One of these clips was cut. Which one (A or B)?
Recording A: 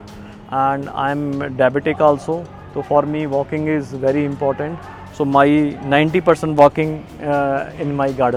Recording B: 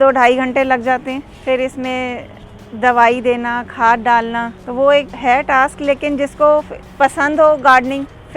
B